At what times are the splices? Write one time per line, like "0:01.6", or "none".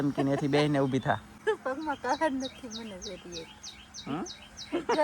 0:01.3